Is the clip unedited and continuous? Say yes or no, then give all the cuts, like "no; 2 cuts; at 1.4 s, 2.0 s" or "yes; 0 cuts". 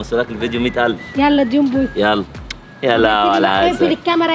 yes; 0 cuts